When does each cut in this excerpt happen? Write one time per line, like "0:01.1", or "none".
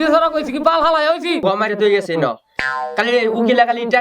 0:01.4